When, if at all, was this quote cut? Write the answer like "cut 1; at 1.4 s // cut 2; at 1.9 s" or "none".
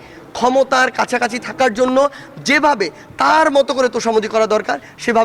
none